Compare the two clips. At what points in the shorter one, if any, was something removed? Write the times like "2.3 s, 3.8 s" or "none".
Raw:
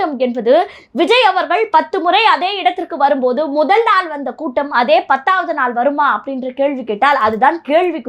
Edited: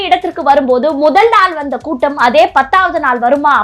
none